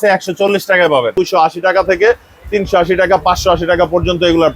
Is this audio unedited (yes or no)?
no